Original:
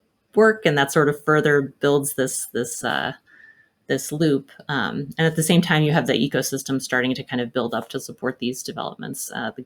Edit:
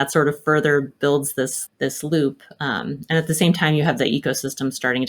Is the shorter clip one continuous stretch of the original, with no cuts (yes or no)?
no